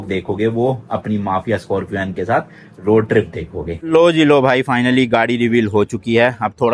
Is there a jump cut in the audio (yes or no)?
yes